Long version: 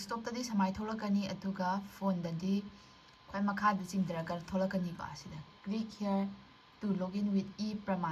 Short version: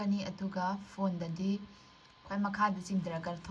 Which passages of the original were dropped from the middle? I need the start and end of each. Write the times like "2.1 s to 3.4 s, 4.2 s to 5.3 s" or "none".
none